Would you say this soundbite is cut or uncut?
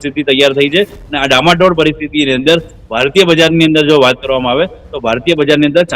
uncut